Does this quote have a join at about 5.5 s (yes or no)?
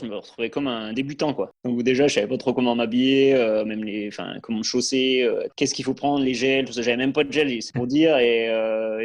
yes